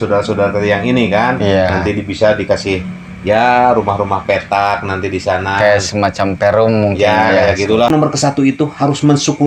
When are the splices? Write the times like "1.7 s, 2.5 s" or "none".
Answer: 7.9 s